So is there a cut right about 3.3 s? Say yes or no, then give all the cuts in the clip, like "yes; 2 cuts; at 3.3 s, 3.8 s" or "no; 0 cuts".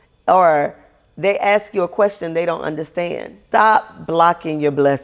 yes; 1 cut; at 3.3 s